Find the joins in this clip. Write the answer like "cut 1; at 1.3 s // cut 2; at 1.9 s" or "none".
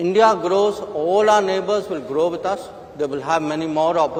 none

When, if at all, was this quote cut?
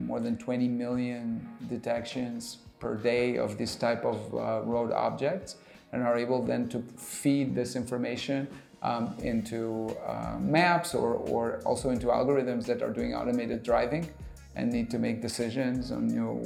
none

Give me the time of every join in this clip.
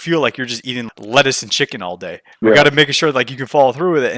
cut 1; at 0.8 s // cut 2; at 2.2 s

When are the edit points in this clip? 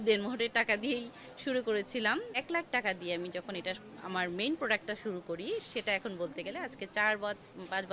cut 1; at 2.3 s

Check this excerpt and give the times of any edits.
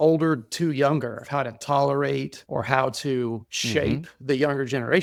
none

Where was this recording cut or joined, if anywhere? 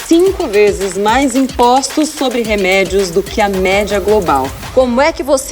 cut 1; at 4.6 s

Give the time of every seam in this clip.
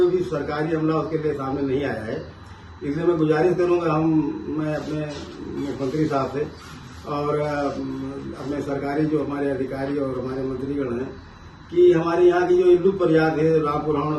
none

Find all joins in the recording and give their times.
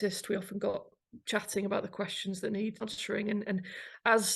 cut 1; at 0.9 s // cut 2; at 2.8 s

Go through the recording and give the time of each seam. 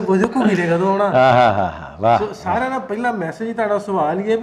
none

